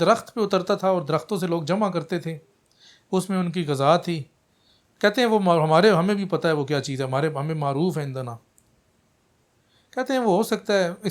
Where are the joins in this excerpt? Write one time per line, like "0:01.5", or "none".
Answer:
none